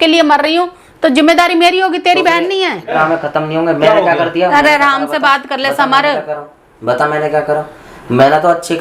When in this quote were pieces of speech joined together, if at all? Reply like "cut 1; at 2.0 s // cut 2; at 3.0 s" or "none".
cut 1; at 2.9 s